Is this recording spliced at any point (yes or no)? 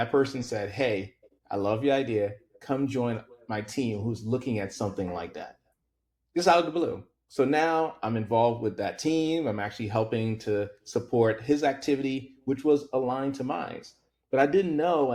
no